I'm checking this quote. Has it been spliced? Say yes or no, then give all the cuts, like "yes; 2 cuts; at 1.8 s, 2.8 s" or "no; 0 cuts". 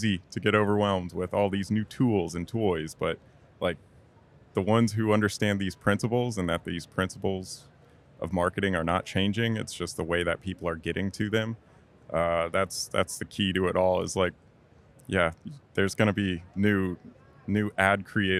no; 0 cuts